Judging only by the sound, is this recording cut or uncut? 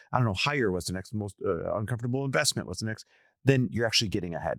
uncut